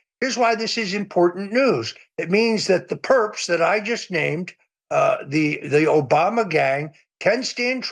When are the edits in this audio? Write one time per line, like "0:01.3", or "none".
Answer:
none

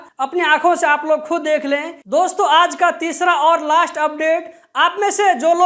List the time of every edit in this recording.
0:02.0

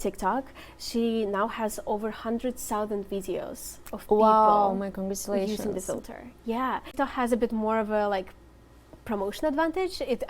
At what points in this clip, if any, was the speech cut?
0:07.0

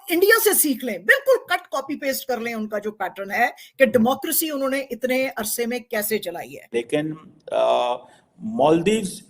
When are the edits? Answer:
0:06.6

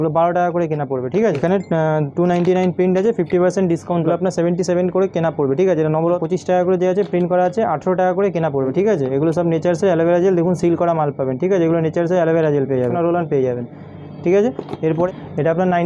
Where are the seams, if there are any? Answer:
0:01.4
0:04.1
0:06.2
0:08.7
0:12.9
0:15.1

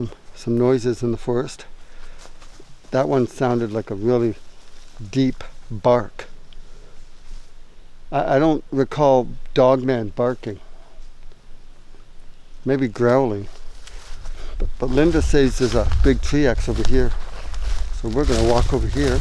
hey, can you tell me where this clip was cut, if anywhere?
none

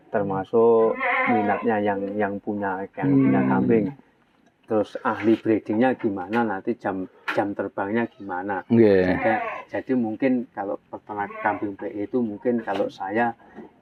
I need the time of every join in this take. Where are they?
none

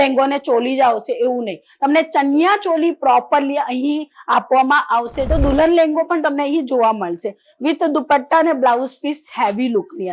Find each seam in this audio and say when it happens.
0:05.2

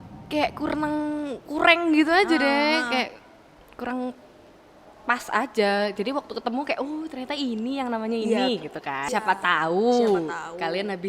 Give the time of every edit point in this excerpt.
0:09.1

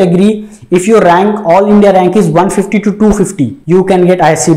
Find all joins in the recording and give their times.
0:03.6

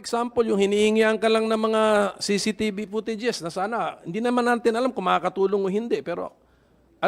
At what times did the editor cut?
none

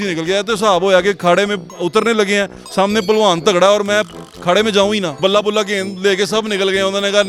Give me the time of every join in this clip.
0:05.2

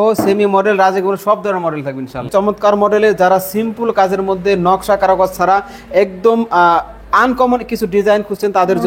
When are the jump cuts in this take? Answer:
0:02.3

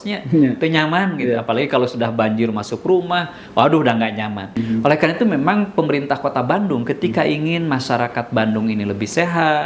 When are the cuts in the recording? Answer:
0:04.6

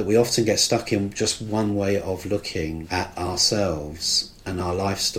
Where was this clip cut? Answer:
0:02.8

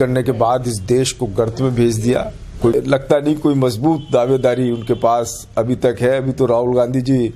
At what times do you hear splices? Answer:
0:02.7

